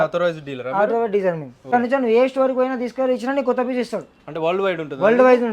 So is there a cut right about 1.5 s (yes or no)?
yes